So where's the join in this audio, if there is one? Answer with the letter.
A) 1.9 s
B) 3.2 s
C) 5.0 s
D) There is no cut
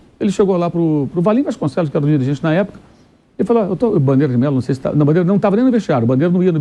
D